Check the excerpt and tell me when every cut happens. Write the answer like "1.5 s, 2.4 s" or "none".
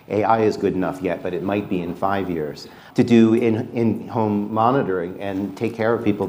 2.8 s